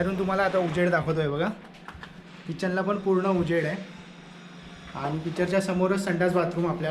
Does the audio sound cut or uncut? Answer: uncut